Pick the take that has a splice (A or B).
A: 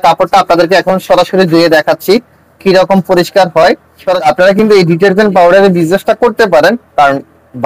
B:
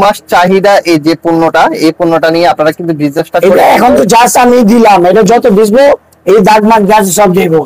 A